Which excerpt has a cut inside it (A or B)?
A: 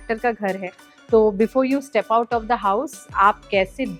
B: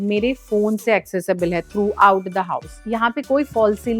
B